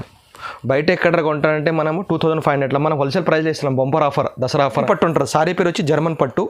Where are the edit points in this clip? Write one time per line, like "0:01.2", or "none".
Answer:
0:04.8